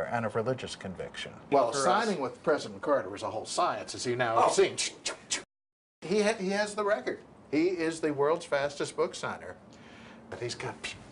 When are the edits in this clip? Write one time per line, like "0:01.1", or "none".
0:01.3

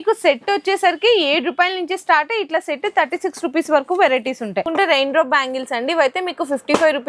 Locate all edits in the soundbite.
0:04.6

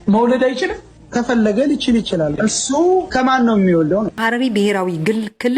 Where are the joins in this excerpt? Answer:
0:04.1

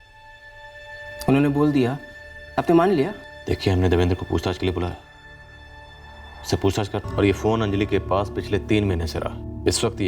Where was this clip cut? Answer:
0:07.1

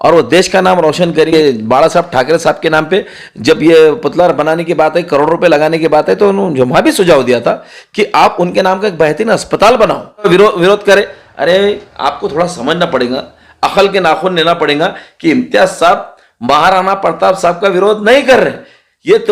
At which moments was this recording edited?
0:01.3
0:10.3

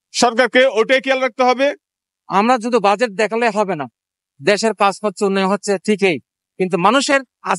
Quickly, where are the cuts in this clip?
0:02.2

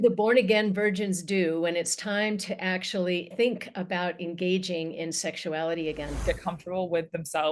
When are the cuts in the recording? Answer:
0:03.3
0:06.2

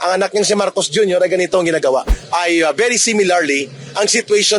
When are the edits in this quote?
0:02.2

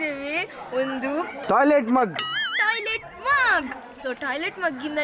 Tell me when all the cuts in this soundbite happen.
0:01.4

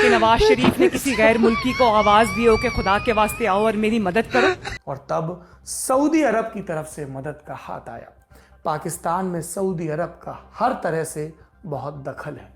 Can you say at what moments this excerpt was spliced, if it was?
0:04.6

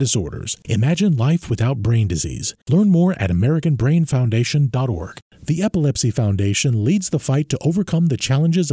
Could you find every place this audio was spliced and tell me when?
0:05.2

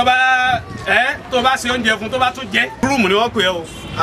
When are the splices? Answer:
0:02.7

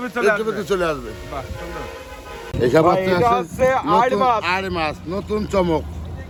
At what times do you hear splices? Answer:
none

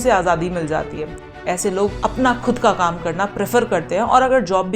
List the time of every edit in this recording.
0:01.1

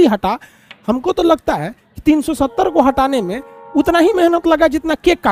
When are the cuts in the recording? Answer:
none

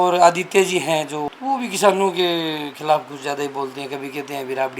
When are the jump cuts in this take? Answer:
0:01.3

